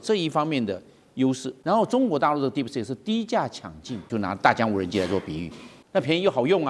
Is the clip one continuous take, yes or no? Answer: no